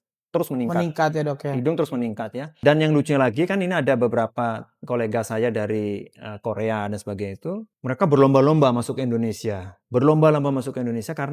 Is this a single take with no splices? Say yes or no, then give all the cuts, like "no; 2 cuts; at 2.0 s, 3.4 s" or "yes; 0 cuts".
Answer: no; 2 cuts; at 2.6 s, 7.7 s